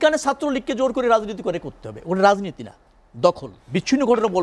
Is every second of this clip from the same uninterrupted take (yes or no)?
no